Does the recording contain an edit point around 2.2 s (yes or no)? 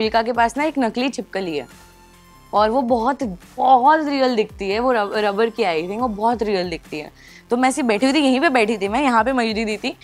no